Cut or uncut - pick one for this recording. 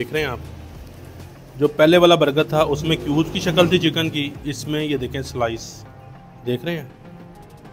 uncut